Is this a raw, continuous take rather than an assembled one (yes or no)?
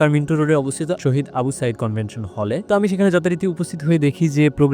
yes